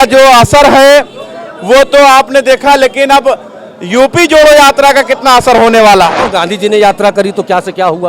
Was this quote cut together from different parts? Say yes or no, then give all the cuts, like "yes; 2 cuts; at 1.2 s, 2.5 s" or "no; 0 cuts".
yes; 1 cut; at 6.2 s